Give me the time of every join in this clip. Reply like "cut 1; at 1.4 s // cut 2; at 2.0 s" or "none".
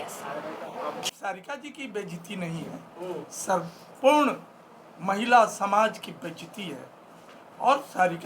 cut 1; at 1.0 s

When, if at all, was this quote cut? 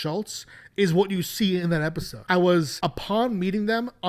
cut 1; at 2.1 s // cut 2; at 2.7 s

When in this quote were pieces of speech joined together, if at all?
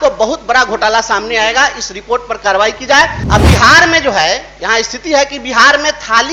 cut 1; at 3.2 s

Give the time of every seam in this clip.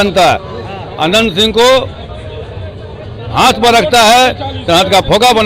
none

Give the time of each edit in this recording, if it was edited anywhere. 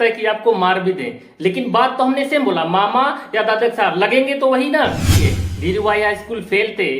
cut 1; at 5.2 s

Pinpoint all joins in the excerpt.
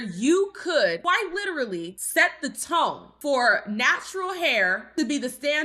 cut 1; at 1.0 s // cut 2; at 2.0 s

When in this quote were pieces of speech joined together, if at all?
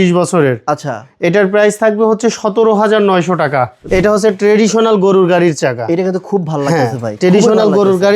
cut 1; at 3.8 s

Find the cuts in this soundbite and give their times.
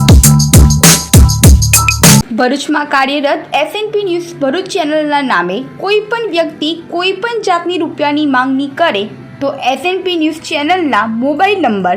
cut 1; at 2.3 s

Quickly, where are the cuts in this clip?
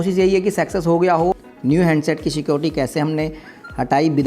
cut 1; at 1.4 s

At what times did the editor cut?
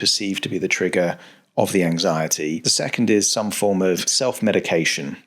cut 1; at 2.7 s // cut 2; at 4.1 s

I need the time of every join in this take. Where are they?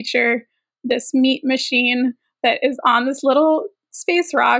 none

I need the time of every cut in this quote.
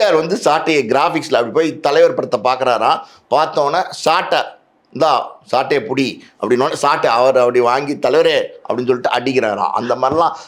none

